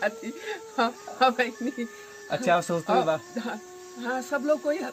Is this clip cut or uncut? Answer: uncut